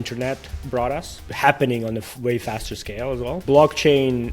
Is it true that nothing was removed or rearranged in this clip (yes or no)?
no